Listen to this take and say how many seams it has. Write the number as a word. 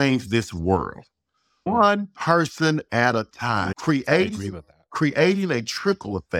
one